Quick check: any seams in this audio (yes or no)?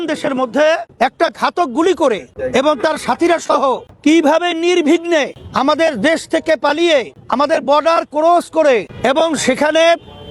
yes